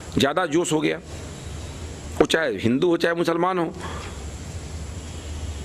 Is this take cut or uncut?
uncut